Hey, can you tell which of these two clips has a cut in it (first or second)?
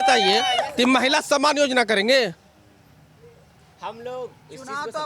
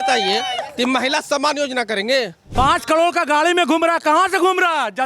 second